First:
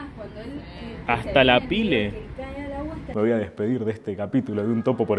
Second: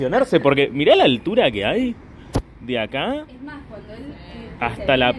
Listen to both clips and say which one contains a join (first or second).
first